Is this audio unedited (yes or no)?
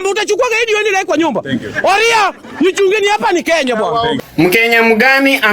no